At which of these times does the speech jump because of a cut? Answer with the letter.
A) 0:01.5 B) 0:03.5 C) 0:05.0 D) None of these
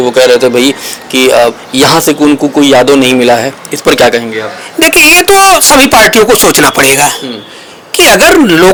D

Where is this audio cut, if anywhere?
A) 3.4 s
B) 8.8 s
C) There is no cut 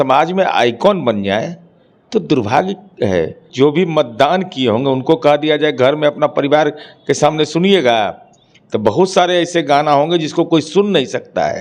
A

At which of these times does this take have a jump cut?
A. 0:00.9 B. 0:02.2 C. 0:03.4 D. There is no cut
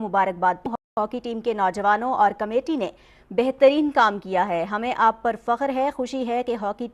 A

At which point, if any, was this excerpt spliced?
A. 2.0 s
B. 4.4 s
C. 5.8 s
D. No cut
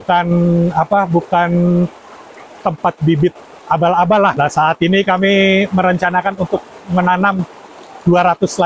B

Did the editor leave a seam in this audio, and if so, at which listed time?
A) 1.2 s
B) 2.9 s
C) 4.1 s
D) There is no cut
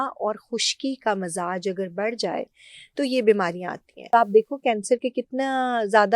C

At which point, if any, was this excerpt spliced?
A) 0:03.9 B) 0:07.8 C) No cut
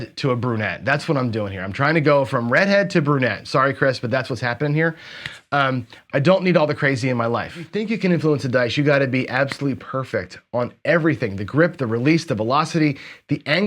B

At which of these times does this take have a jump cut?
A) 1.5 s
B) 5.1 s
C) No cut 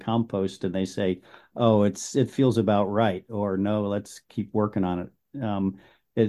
C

